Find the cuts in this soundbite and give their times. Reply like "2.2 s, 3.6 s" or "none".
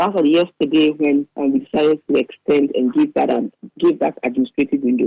1.3 s